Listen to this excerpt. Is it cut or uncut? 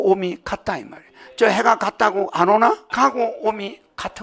cut